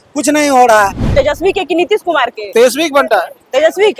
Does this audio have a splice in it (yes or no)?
yes